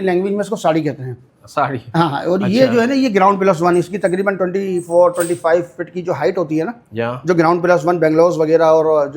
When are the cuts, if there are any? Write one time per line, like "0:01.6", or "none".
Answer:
none